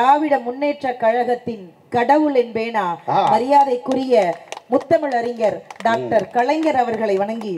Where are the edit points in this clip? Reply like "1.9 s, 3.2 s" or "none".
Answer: none

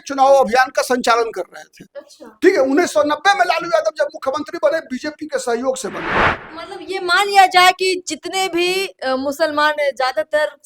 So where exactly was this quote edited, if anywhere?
6.4 s

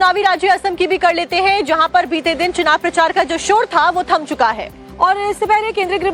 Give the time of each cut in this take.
1.4 s

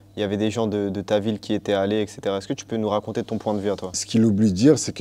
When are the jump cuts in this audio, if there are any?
2.8 s, 4.0 s

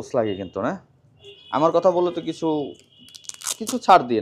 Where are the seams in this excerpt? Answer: 1.4 s

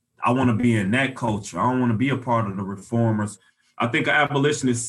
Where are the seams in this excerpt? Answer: 3.1 s

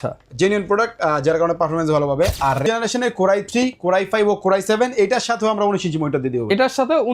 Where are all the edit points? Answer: 2.6 s

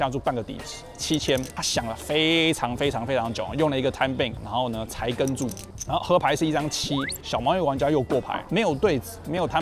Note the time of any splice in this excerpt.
1.6 s, 4.4 s, 8.4 s

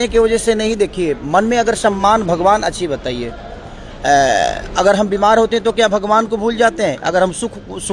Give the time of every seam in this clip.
none

